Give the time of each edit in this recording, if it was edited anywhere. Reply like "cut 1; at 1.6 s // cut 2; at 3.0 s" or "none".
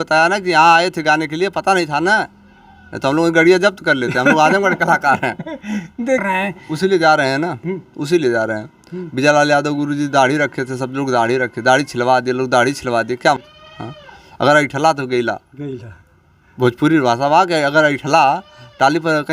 cut 1; at 6.2 s // cut 2; at 13.4 s